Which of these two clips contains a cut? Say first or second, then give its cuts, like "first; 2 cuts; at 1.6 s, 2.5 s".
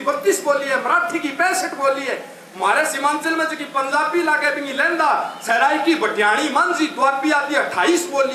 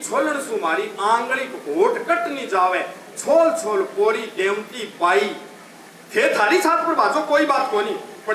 second; 1 cut; at 5.8 s